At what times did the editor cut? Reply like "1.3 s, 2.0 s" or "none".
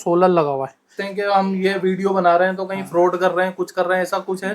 1.0 s